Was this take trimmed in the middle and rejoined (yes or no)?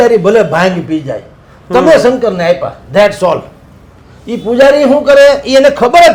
no